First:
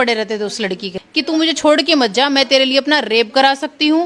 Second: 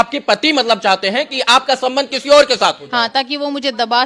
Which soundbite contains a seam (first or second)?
first